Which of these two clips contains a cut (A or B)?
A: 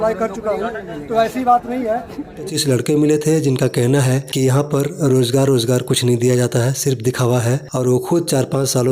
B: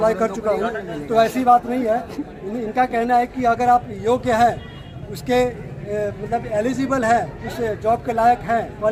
A